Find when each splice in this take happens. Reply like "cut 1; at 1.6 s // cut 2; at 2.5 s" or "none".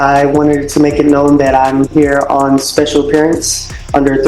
none